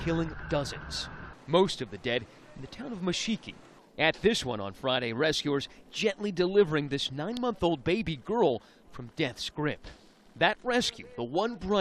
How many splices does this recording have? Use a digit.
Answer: 1